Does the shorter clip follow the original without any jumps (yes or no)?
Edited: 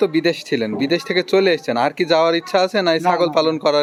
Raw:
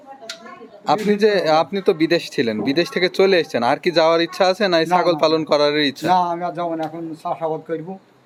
yes